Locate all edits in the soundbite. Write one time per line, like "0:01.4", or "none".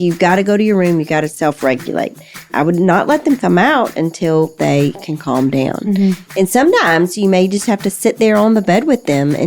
0:02.5